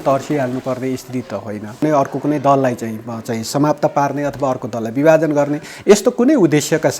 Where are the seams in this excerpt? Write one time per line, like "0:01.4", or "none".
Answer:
0:01.8